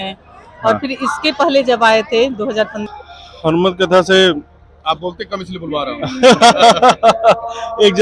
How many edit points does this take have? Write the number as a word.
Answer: one